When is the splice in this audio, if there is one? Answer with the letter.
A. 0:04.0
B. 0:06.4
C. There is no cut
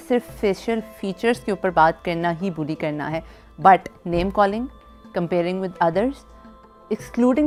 C